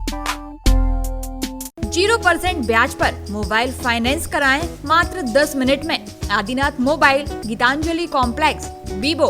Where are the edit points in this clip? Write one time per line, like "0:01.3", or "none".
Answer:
none